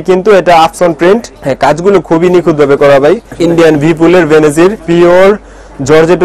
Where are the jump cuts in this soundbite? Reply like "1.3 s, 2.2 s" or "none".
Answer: 1.4 s, 3.3 s, 4.8 s